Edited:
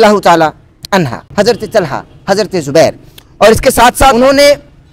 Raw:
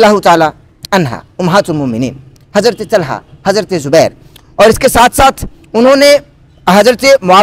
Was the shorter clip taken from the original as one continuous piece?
no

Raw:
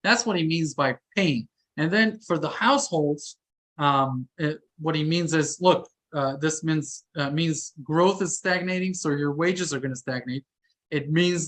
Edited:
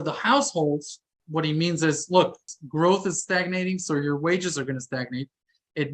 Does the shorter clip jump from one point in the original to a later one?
yes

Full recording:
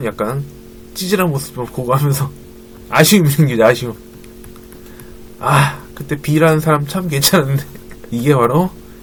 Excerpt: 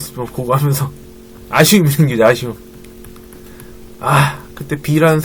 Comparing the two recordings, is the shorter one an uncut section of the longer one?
yes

